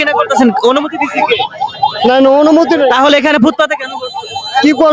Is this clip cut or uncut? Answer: uncut